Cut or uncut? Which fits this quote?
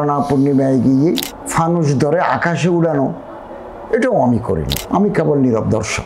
cut